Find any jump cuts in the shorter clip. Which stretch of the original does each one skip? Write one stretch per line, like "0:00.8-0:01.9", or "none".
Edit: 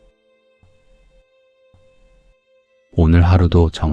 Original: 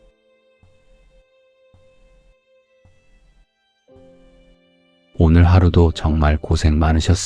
0:02.8-0:05.0

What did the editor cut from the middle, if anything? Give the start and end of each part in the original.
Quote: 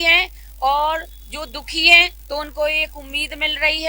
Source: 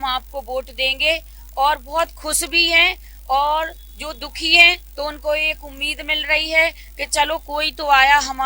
none

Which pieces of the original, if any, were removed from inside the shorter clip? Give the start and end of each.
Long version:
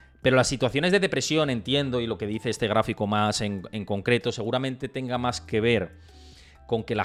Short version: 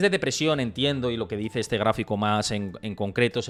none

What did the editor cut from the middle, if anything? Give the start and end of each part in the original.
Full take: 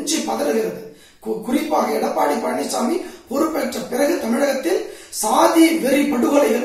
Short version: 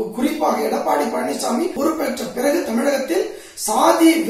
0:03.0-0:03.3

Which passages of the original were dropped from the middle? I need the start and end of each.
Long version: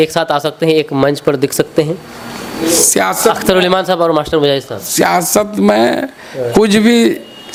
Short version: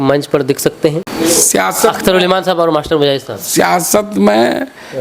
0:02.0-0:02.5

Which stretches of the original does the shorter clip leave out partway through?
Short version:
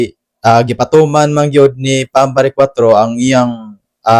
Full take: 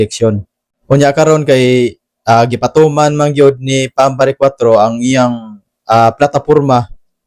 none

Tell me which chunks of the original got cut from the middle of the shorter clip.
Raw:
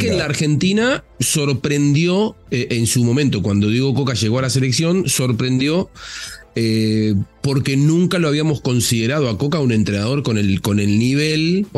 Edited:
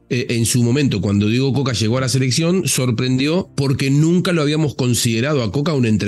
0:05.9-0:07.4

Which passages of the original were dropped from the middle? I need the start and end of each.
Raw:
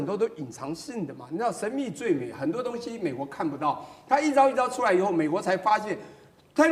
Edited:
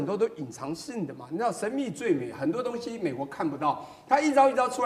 none

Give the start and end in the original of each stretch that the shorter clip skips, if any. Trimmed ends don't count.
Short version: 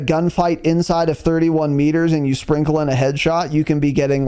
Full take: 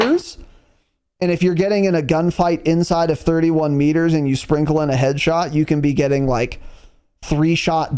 none

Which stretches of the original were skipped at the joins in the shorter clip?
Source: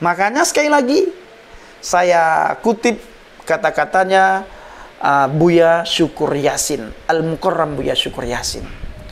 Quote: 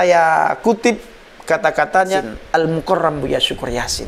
0:04.2-0:06.7

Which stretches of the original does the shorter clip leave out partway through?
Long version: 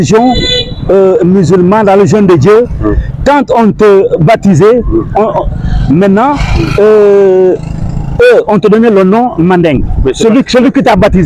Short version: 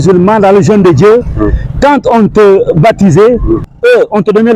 0:05.1-0:08.0

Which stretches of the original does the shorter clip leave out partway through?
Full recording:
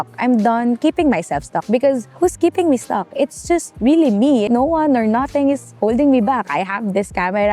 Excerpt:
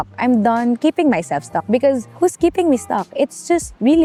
none

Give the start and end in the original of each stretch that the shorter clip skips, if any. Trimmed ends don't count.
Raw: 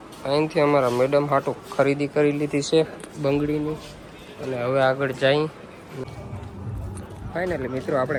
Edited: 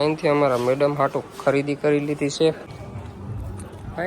0:03.0-0:06.1

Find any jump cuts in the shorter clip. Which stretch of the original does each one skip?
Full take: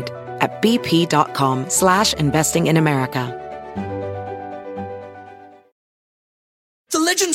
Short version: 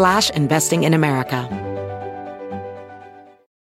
0:03.3-0:03.7

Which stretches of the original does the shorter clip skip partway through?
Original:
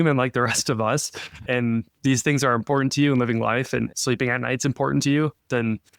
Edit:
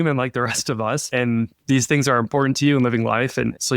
0:01.0-0:01.4

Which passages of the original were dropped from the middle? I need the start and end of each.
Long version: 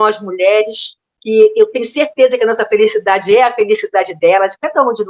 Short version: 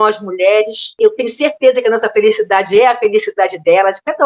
0:01.0-0:01.5

